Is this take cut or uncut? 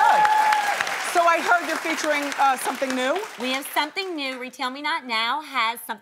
uncut